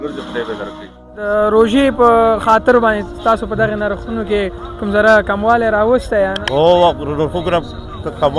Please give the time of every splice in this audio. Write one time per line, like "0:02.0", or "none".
0:01.3
0:06.4